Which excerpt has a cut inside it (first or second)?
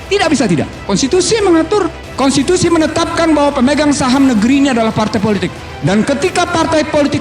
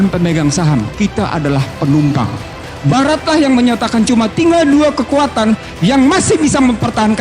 second